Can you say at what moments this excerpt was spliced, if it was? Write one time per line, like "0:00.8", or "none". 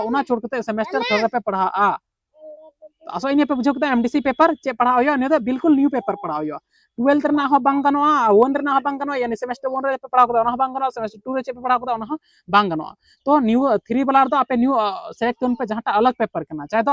none